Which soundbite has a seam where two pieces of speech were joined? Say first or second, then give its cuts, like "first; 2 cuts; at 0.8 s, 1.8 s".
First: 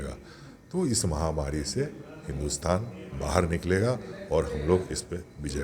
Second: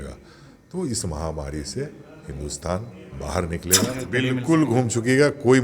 second; 1 cut; at 4.0 s